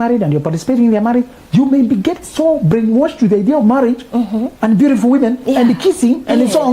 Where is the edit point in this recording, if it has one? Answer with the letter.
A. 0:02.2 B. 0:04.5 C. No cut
B